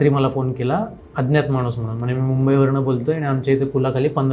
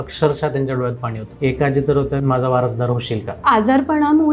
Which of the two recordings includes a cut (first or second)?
second